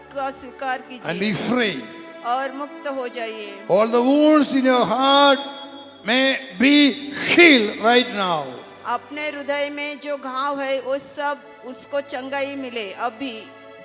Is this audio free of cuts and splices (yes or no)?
yes